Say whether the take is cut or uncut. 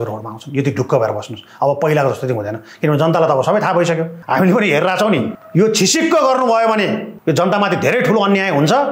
cut